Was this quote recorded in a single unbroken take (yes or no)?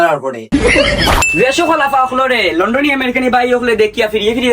no